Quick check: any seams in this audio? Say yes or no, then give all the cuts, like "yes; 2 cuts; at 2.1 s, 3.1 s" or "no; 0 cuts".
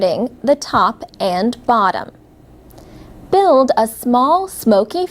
no; 0 cuts